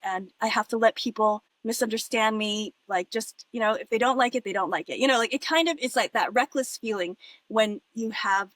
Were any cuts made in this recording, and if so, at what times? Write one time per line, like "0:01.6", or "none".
0:01.5